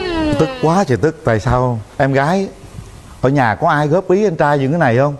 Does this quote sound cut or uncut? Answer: uncut